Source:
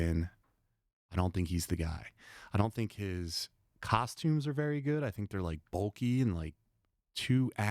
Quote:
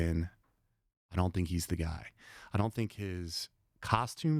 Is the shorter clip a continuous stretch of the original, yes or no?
yes